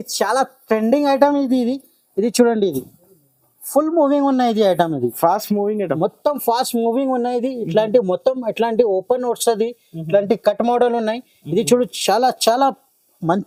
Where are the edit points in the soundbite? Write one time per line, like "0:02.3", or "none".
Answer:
none